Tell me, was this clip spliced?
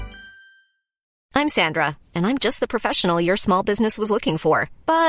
yes; 1 cut; at 1.1 s

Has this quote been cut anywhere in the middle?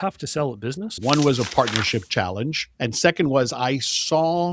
yes; 1 cut; at 1.0 s

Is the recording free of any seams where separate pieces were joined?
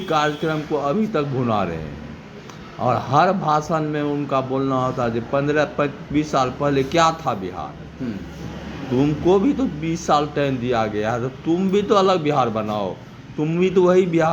yes; 0 cuts

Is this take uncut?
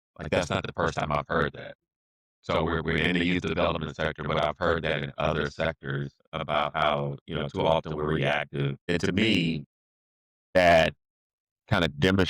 no; 1 cut; at 8.8 s

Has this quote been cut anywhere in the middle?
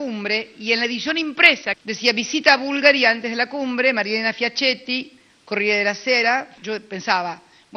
yes; 1 cut; at 6.5 s

